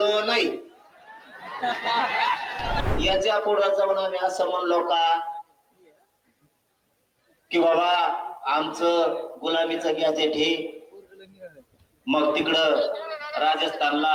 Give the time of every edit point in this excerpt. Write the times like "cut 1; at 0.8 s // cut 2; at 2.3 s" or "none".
cut 1; at 2.8 s